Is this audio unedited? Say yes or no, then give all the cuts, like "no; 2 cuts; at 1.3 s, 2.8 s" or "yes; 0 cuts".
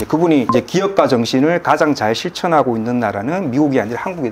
yes; 0 cuts